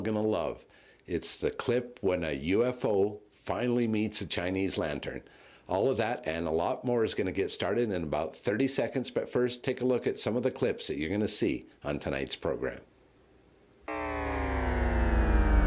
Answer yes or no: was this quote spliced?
no